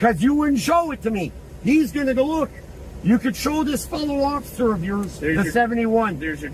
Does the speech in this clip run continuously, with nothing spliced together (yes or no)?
yes